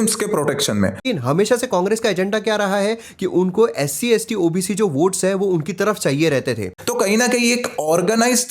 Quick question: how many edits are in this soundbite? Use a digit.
2